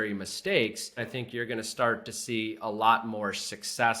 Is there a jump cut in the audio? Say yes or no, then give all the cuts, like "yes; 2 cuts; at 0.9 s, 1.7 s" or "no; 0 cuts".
yes; 1 cut; at 1.1 s